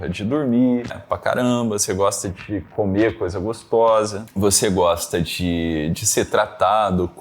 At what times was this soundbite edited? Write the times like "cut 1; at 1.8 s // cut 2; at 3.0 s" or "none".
cut 1; at 1.0 s // cut 2; at 4.2 s